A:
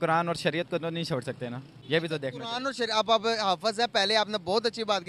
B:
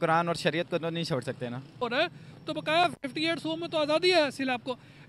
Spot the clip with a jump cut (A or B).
B